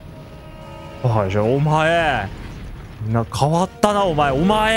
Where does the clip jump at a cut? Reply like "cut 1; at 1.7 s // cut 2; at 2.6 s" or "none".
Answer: none